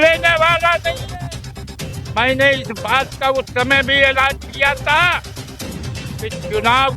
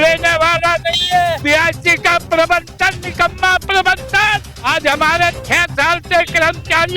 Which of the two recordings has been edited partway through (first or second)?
second